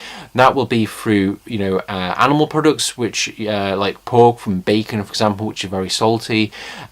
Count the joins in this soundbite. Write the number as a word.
one